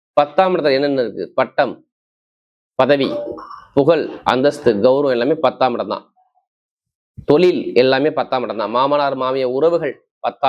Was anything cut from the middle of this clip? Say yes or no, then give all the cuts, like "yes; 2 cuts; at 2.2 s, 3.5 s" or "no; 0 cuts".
no; 0 cuts